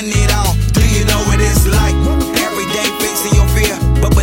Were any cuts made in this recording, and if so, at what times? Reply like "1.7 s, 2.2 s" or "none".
none